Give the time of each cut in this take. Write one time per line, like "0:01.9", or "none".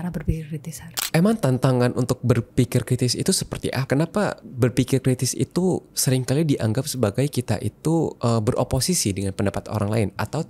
0:00.9
0:03.8
0:04.5
0:08.2